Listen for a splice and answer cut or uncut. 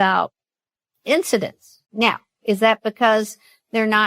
cut